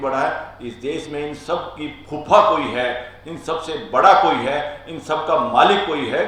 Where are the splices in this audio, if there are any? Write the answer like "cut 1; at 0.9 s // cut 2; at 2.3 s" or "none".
none